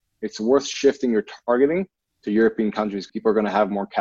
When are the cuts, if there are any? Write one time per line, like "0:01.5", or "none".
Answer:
0:03.0